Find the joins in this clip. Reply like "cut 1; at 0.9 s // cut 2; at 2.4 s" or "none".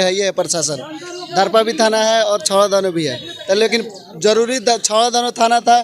none